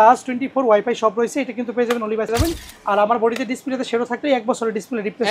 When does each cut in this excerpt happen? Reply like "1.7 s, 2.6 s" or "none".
2.3 s